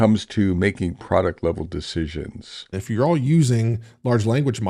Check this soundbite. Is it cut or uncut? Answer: cut